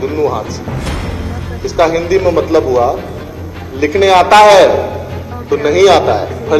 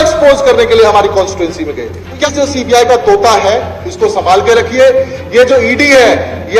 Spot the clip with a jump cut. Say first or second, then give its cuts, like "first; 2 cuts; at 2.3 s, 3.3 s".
second; 1 cut; at 2.3 s